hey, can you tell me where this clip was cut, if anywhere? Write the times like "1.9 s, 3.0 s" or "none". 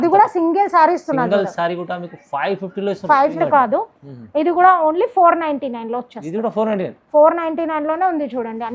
3.3 s